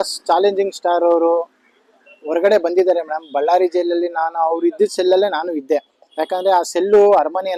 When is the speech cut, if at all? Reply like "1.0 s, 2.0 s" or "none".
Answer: none